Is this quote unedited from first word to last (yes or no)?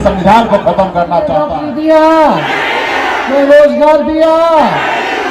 no